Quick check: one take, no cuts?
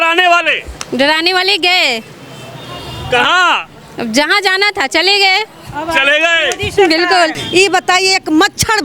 no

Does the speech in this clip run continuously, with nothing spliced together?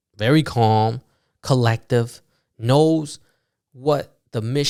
yes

